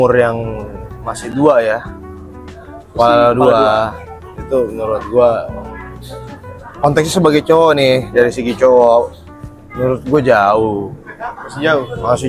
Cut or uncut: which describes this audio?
uncut